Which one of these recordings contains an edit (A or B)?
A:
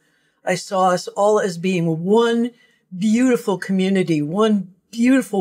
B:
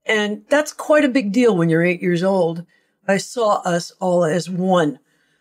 B